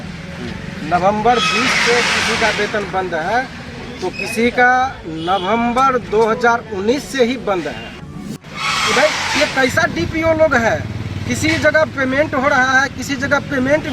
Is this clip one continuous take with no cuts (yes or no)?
no